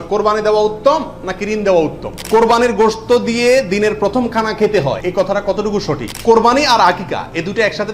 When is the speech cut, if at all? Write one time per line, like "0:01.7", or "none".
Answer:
0:02.2
0:05.0
0:06.1